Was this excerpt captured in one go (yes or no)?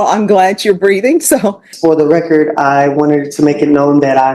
no